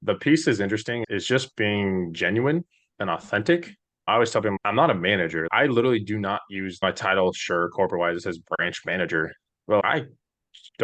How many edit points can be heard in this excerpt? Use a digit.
4